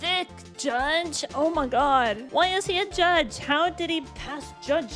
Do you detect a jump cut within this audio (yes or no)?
yes